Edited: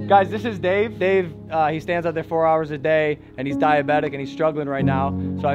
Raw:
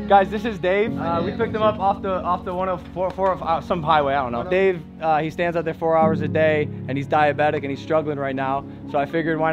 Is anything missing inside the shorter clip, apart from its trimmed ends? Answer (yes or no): yes